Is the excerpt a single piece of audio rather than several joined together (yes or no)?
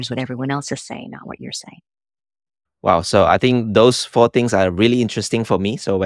yes